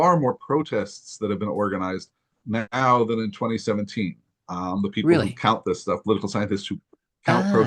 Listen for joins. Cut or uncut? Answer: cut